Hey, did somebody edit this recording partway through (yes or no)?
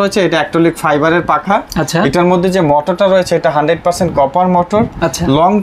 no